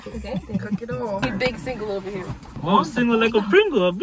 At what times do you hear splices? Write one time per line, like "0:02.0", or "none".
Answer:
0:01.2
0:02.5